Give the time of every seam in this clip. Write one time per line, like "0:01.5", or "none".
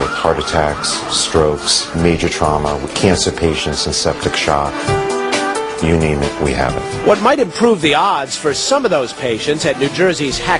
0:03.8